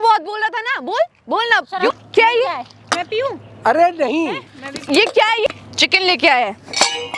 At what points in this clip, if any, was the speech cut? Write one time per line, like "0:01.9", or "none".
0:01.9
0:05.5